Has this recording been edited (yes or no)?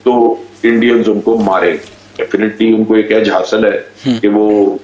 yes